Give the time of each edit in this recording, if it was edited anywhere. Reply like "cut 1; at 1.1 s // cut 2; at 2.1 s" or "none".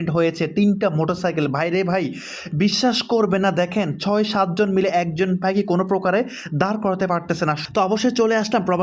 cut 1; at 7.6 s